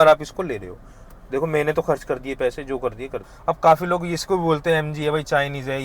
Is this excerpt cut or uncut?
cut